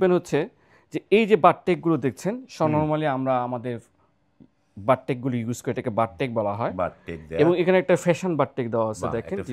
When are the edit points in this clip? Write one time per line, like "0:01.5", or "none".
none